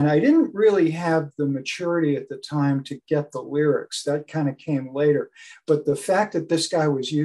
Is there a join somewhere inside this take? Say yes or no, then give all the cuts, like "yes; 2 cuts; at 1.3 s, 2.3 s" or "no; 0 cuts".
no; 0 cuts